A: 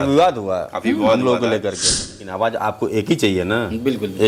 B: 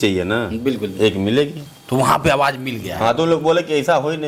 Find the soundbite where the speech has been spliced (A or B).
A